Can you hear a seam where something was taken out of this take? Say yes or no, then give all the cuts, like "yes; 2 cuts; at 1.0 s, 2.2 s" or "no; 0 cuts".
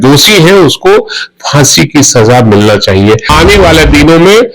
yes; 1 cut; at 3.3 s